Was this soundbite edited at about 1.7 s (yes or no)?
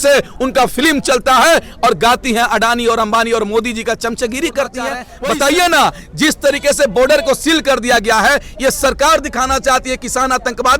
no